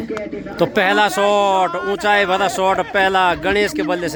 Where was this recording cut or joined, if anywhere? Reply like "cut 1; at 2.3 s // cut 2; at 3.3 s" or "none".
none